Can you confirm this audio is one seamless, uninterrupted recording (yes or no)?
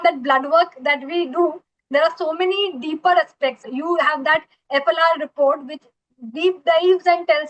no